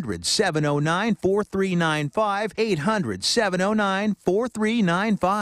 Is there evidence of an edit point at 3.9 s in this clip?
no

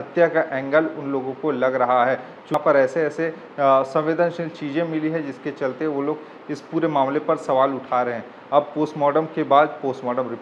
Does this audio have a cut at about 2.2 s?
no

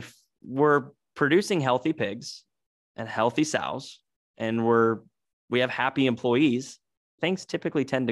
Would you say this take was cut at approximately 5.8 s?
no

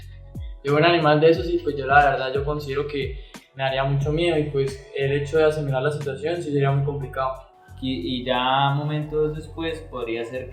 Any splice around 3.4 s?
no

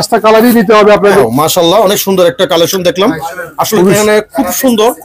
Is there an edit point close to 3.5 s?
no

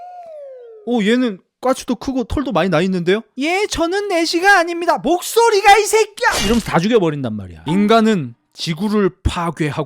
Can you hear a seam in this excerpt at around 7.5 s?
yes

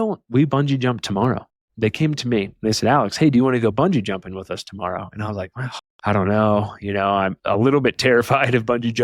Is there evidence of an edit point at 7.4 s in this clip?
yes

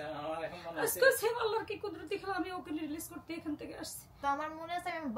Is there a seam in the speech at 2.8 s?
no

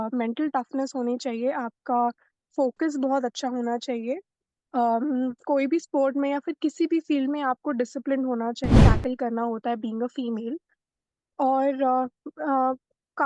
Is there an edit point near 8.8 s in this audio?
yes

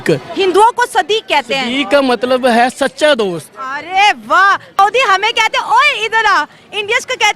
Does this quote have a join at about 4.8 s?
yes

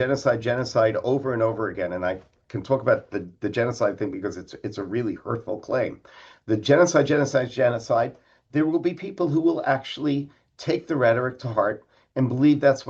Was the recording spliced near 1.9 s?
no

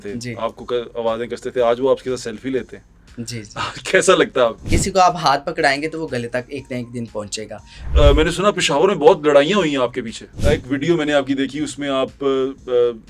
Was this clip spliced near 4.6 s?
yes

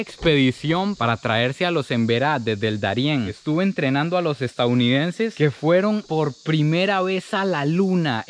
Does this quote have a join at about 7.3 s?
no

